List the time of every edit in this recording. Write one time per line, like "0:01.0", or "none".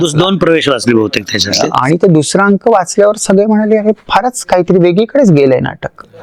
none